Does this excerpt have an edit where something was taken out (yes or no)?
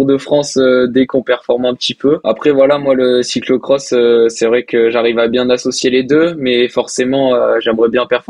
yes